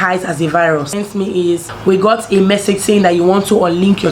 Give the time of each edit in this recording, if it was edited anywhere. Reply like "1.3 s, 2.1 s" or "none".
1.4 s